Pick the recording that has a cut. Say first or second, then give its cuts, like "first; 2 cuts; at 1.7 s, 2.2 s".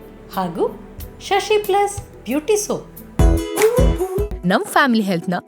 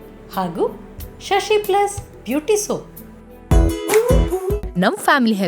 first; 1 cut; at 3.0 s